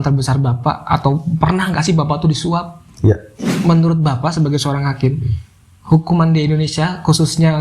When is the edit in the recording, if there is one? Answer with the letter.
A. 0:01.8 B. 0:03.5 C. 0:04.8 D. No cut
B